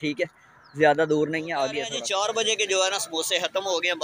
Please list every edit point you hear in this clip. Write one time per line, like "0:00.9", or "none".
0:01.8

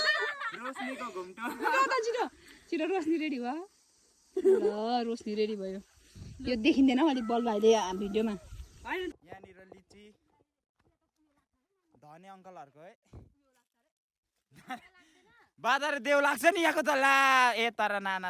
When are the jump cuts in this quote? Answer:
0:09.2

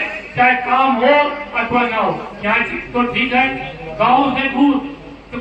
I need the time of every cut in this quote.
0:02.3

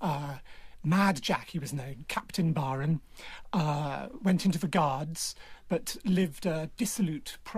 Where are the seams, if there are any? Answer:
none

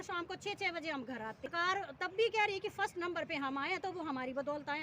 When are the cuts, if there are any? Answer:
0:01.5

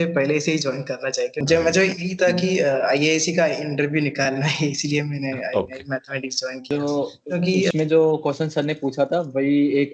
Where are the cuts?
0:01.4
0:06.6

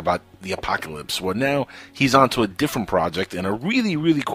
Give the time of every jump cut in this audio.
0:01.1

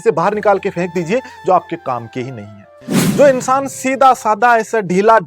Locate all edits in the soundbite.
0:02.9

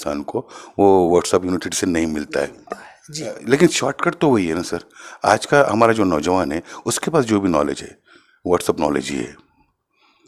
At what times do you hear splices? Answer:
none

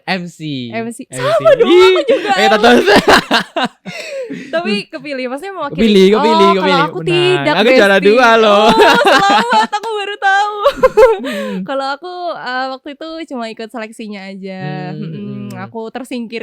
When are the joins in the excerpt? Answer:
none

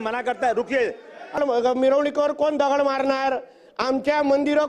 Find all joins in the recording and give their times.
0:01.4

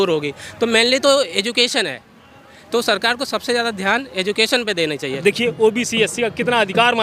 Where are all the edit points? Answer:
0:05.2

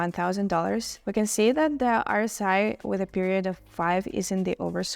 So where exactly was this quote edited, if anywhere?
0:01.0

